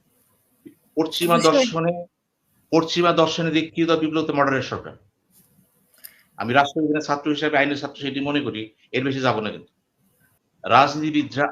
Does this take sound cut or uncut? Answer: cut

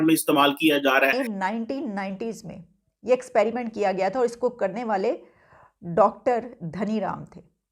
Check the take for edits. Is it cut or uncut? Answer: cut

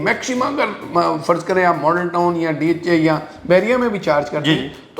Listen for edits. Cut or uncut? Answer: uncut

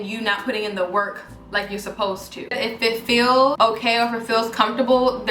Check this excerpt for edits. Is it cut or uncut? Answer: cut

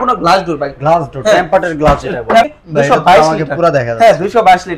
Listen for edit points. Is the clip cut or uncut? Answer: cut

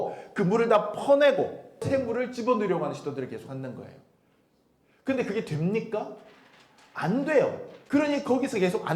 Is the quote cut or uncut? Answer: cut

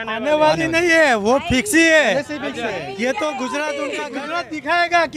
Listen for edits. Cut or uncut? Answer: cut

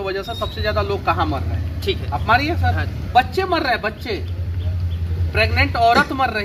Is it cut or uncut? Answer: uncut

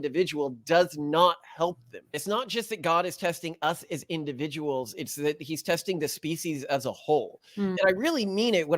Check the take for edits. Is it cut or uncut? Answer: cut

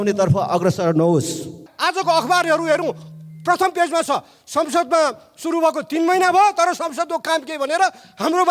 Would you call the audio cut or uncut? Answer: cut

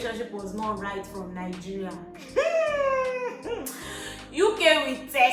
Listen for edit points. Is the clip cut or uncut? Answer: uncut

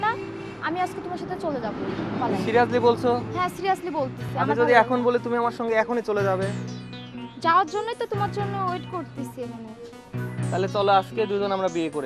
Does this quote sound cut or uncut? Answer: uncut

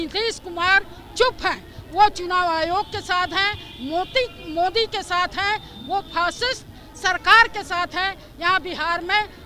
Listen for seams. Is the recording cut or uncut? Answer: uncut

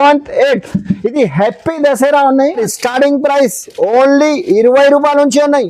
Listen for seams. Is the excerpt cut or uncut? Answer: cut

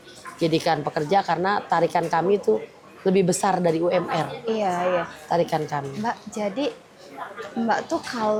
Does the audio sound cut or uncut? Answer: uncut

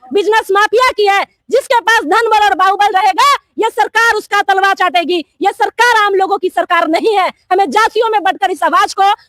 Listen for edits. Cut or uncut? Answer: uncut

